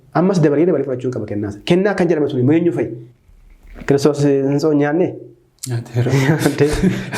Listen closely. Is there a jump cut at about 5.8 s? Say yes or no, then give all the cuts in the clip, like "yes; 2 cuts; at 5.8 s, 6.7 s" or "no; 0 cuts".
no; 1 cut; at 3.1 s